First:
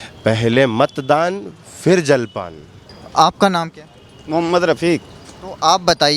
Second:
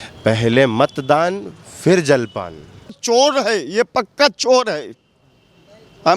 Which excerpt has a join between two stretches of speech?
second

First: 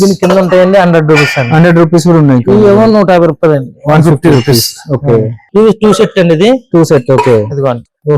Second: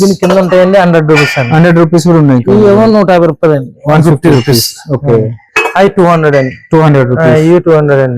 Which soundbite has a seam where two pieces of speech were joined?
first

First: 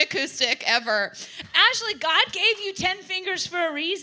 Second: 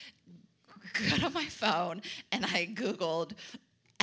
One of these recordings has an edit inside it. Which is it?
first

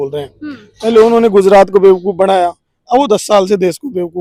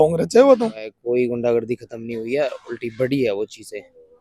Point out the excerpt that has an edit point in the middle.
second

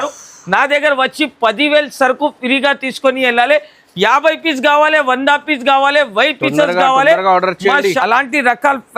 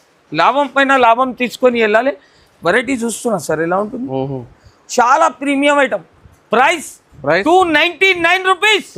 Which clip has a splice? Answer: first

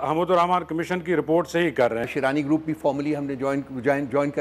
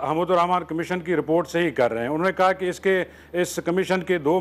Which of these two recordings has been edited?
first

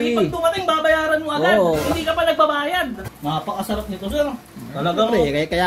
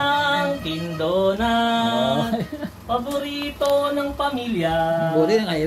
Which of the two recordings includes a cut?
first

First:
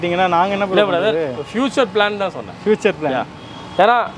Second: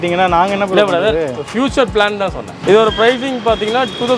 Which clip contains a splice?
second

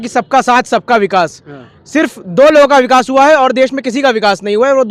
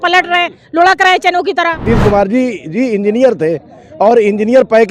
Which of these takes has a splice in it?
second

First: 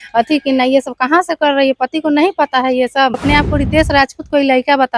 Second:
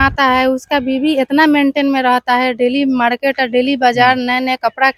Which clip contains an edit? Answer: first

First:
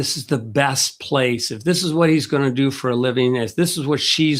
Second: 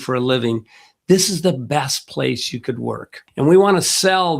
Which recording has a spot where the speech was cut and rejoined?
second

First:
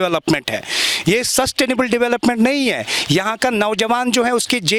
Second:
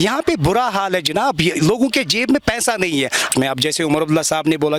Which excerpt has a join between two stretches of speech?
second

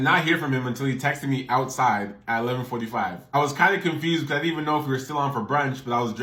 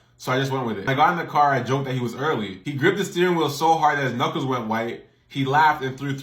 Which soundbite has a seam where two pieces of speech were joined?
second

